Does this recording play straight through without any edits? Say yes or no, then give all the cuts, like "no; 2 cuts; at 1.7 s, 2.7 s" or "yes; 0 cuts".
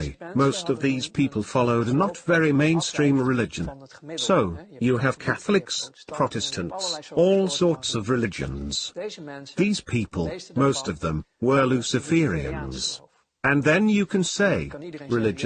yes; 0 cuts